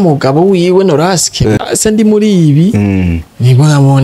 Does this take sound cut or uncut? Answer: cut